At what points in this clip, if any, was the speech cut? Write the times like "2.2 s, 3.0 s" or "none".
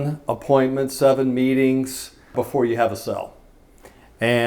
2.4 s